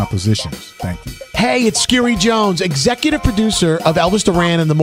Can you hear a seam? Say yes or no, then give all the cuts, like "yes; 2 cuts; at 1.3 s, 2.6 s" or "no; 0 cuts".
no; 0 cuts